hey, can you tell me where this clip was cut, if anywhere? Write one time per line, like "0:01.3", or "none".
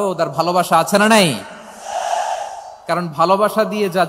none